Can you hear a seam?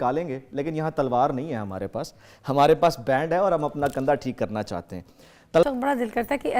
yes; 1 cut; at 5.6 s

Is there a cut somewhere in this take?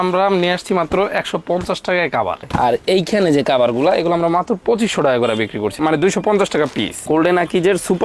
yes; 2 cuts; at 2.4 s, 7.0 s

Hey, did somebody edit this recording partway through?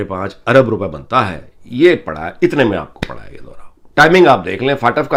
no; 0 cuts

